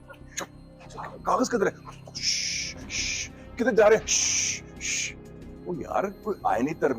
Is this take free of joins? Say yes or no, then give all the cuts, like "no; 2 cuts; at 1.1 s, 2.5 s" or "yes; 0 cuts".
yes; 0 cuts